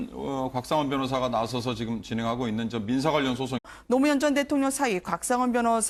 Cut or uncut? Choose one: uncut